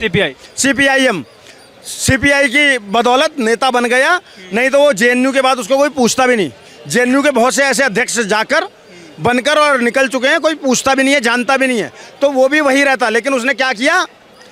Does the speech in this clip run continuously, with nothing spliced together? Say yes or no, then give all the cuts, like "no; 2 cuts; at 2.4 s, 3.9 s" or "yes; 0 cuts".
yes; 0 cuts